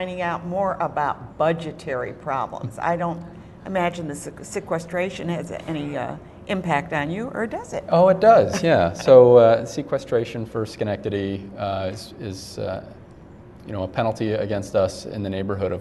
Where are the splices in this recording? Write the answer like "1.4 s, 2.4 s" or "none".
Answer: 13.2 s